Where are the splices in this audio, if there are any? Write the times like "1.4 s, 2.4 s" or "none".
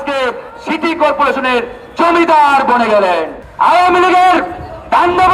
3.4 s